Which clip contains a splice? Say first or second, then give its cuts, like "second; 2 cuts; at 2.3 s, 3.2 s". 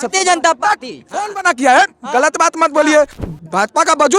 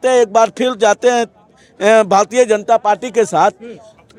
first; 1 cut; at 3.1 s